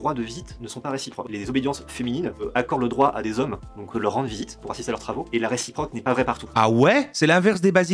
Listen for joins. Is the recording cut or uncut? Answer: cut